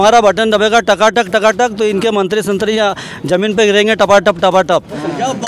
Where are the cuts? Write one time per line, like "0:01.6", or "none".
none